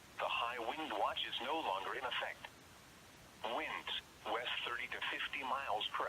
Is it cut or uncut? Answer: cut